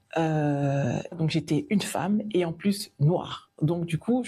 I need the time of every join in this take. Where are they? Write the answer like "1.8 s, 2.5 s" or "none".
1.1 s